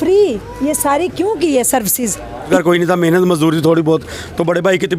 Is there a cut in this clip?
yes; 1 cut; at 2.5 s

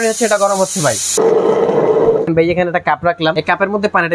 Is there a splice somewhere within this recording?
yes; 3 cuts; at 1.1 s, 2.3 s, 3.3 s

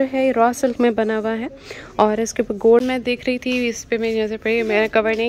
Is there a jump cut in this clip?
yes; 1 cut; at 2.8 s

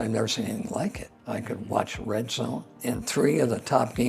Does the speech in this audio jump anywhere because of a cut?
yes; 2 cuts; at 1.1 s, 2.7 s

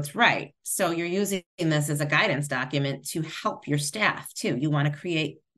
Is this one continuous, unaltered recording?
yes; 0 cuts

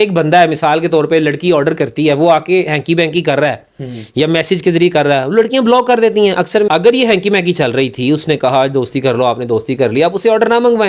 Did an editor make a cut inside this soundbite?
yes; 1 cut; at 6.7 s

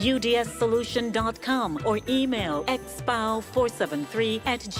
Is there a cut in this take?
no; 0 cuts

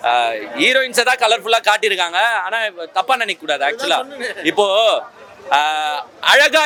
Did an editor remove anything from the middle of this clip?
no; 0 cuts

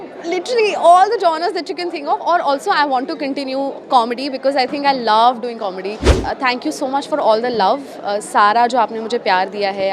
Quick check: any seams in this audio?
yes; 1 cut; at 6.2 s

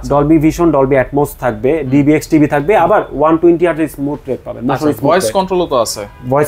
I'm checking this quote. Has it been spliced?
no; 0 cuts

